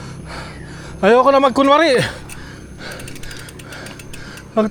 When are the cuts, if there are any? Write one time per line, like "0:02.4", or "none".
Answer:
none